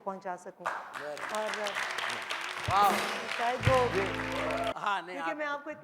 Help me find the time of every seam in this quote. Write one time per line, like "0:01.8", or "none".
0:04.7